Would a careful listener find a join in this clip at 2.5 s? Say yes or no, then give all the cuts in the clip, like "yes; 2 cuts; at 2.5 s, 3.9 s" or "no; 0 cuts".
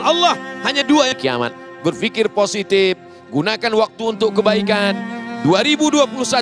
no; 1 cut; at 1.2 s